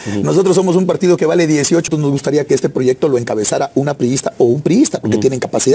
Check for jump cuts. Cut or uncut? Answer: cut